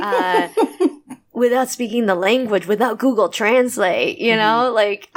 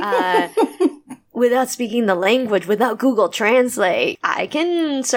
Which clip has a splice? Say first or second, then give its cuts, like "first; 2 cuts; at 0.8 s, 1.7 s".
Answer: second; 1 cut; at 4.1 s